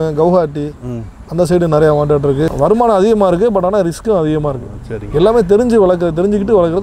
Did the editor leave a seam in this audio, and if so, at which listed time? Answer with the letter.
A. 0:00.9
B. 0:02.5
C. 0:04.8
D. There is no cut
B